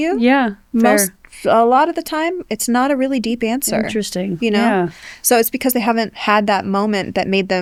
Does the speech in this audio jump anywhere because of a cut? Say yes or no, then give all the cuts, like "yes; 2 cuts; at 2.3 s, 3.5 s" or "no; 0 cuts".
no; 0 cuts